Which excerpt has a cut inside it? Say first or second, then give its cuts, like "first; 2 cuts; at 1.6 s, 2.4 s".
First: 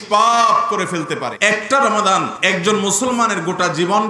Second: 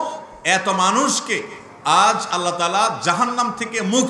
first; 2 cuts; at 1.3 s, 2.3 s